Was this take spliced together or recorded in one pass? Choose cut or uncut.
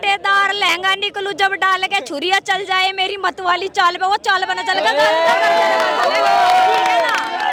uncut